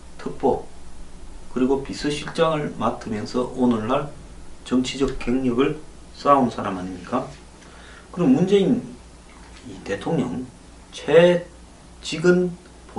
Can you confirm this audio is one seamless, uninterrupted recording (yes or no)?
yes